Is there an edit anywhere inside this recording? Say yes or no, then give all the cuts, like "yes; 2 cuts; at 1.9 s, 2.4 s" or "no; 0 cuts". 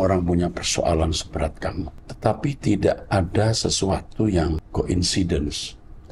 yes; 2 cuts; at 2.0 s, 4.6 s